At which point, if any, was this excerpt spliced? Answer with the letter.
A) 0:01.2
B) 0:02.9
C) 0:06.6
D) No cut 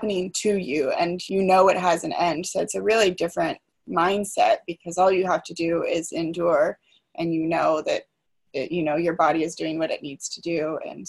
A